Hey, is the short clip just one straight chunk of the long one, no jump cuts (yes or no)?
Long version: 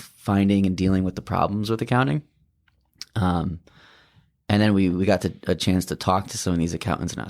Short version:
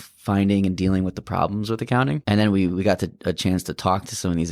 no